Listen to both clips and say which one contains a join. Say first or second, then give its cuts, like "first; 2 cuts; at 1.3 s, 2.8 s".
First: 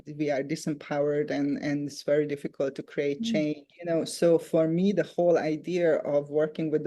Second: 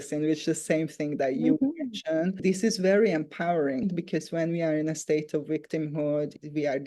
second; 2 cuts; at 2.4 s, 3.9 s